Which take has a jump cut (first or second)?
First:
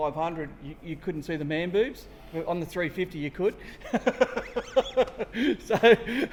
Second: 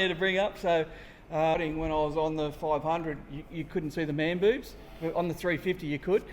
second